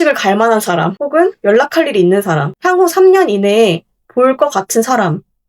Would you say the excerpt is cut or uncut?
cut